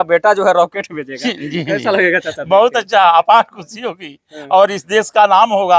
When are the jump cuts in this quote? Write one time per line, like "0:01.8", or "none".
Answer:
none